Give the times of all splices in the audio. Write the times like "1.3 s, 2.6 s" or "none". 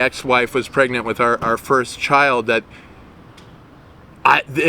none